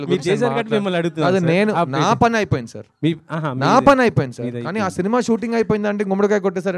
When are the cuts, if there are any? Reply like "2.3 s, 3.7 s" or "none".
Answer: none

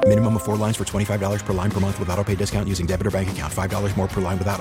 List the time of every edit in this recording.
none

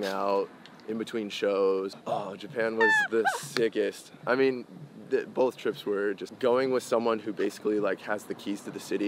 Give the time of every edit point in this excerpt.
2.0 s, 6.3 s

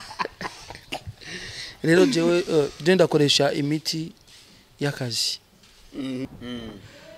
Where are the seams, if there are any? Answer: 6.2 s

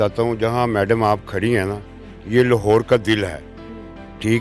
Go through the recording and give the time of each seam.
none

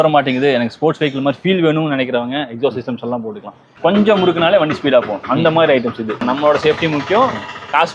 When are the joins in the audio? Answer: 3.9 s, 6.2 s

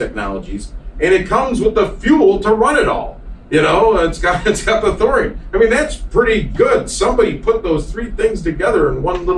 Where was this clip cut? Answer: none

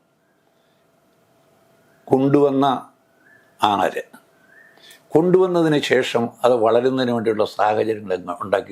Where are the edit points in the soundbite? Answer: none

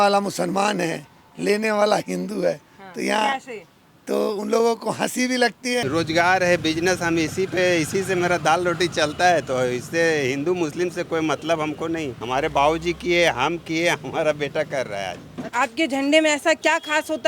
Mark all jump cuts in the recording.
5.8 s, 12.2 s, 15.5 s

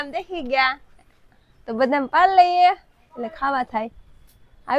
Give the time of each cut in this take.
none

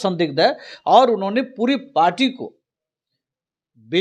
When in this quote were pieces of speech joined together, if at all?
none

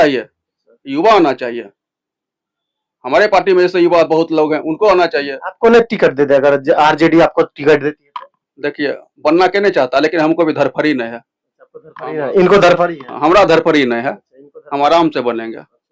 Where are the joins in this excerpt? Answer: none

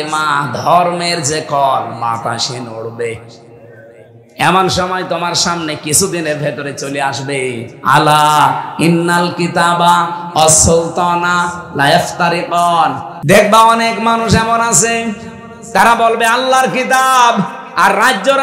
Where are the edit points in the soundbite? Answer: 13.1 s

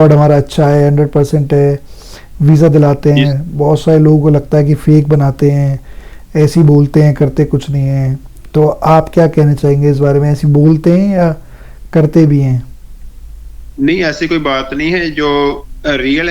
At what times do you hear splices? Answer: none

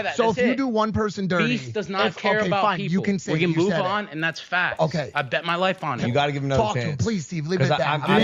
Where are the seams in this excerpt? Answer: none

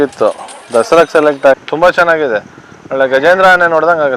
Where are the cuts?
1.6 s

